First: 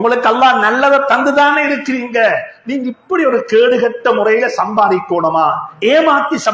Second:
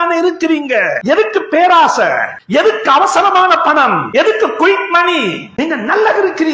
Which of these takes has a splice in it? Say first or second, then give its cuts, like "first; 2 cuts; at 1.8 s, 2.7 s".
second; 4 cuts; at 1.0 s, 2.3 s, 4.0 s, 5.4 s